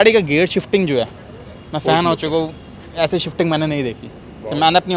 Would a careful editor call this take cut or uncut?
uncut